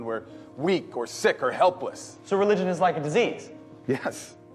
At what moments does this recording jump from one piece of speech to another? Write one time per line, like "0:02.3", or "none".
0:02.5